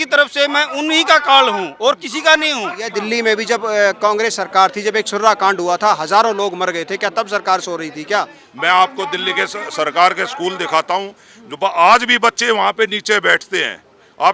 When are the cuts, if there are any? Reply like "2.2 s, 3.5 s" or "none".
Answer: 2.9 s, 8.4 s